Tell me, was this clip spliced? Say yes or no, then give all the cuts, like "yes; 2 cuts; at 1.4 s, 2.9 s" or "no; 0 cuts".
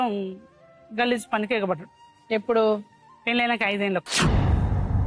no; 0 cuts